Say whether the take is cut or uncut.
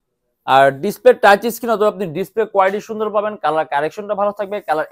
uncut